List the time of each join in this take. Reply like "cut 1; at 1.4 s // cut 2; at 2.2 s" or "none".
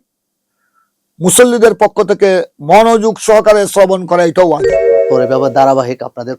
cut 1; at 5.0 s